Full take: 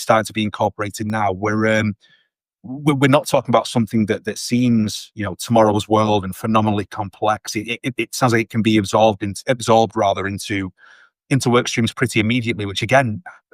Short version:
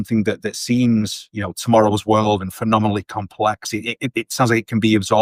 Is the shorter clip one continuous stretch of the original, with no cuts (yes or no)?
yes